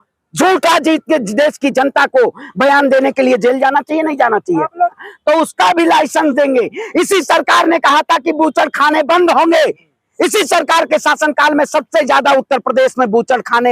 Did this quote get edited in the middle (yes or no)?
yes